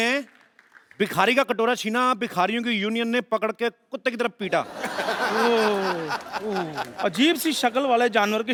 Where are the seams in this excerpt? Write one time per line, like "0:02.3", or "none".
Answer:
none